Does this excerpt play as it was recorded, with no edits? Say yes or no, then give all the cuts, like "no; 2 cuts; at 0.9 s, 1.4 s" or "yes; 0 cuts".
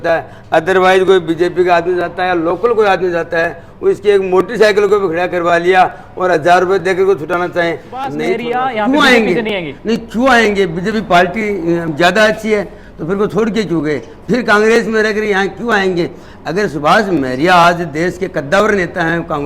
no; 1 cut; at 8.4 s